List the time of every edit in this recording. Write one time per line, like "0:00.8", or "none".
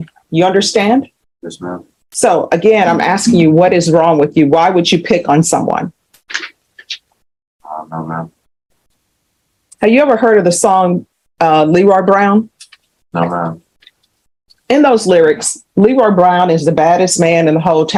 none